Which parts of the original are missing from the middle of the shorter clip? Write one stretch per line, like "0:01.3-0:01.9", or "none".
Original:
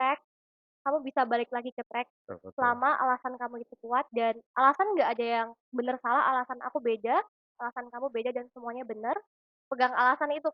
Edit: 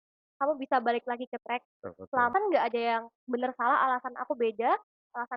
0:02.8-0:04.8

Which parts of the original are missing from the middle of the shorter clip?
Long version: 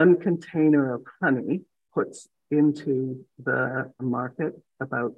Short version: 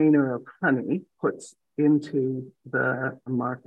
0:01.7-0:01.8

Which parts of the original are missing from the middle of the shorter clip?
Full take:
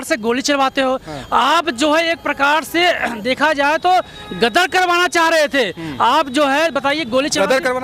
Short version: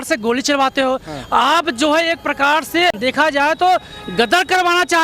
0:03.0-0:03.2

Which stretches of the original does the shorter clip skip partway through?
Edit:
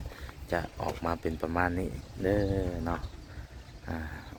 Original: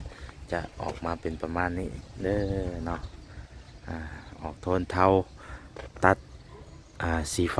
none

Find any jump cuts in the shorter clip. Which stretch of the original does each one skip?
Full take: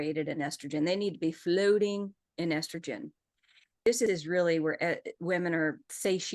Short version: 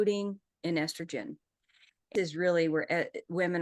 0:03.9-0:04.0

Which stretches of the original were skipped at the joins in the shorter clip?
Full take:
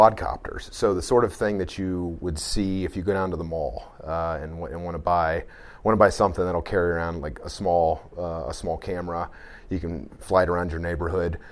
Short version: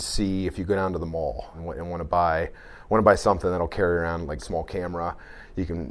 0:03.9-0:04.5
0:07.4-0:08.6

